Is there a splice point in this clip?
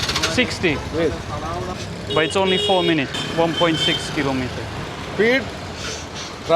yes; 2 cuts; at 3.2 s, 4.9 s

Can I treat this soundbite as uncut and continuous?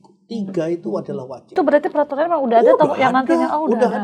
no; 1 cut; at 1.5 s

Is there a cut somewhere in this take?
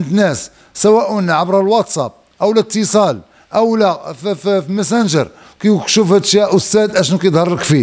no; 0 cuts

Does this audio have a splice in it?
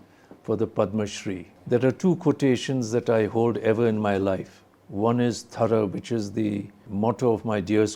yes; 2 cuts; at 1.5 s, 6.8 s

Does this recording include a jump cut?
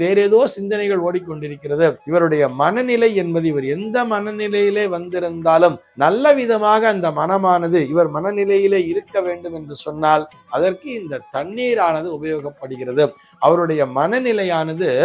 yes; 1 cut; at 2.0 s

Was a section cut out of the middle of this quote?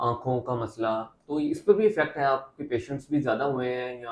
no; 0 cuts

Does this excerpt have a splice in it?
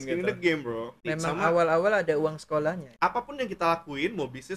yes; 2 cuts; at 1.0 s, 2.9 s

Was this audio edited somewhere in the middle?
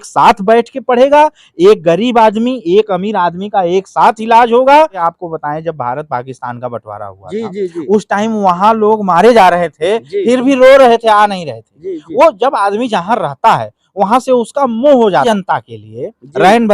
yes; 2 cuts; at 5.0 s, 15.3 s

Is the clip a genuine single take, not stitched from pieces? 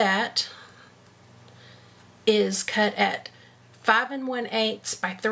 yes; 0 cuts

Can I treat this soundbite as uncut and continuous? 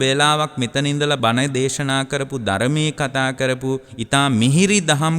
no; 2 cuts; at 1.2 s, 3.9 s

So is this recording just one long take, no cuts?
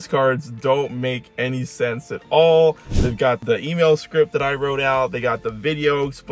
no; 1 cut; at 3.4 s

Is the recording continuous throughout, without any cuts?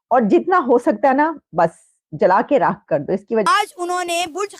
no; 1 cut; at 3.4 s

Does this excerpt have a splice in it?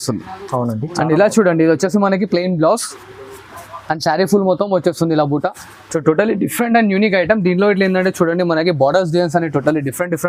no; 0 cuts

